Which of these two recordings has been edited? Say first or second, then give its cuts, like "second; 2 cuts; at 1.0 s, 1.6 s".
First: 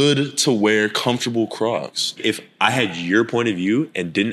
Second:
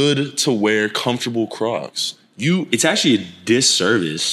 first; 1 cut; at 2.2 s